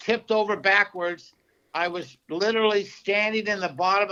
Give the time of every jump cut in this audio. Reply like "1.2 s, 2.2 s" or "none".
none

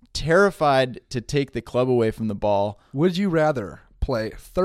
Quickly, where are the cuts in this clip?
2.8 s, 3.7 s

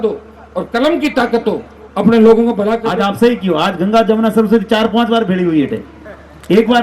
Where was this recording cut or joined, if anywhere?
2.9 s

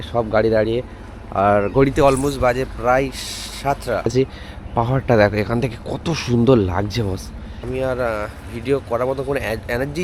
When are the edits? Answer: 4.1 s, 7.6 s

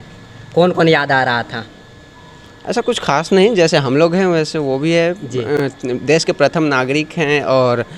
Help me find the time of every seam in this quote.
none

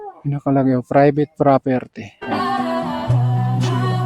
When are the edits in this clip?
2.2 s

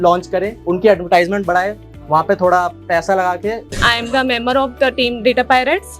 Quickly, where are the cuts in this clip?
3.7 s

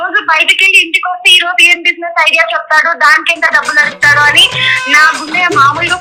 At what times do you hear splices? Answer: none

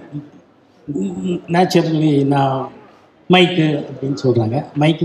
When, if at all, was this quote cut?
none

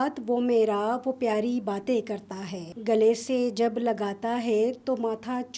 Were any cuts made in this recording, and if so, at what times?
2.7 s

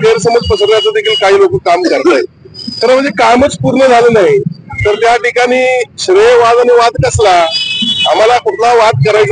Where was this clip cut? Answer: none

